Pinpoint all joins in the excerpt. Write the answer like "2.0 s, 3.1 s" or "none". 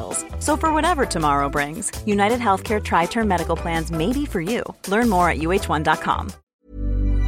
6.3 s